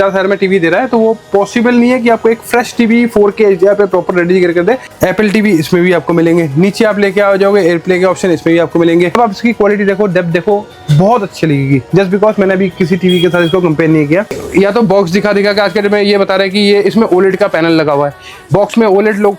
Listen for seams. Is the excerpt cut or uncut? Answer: cut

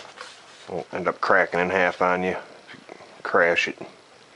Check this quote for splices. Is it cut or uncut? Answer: cut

